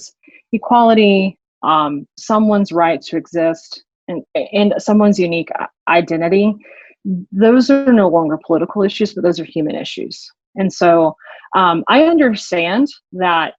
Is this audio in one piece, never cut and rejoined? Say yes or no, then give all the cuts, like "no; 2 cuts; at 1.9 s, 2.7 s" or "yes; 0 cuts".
yes; 0 cuts